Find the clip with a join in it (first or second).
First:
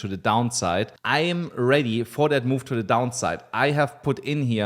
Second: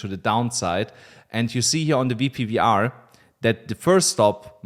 first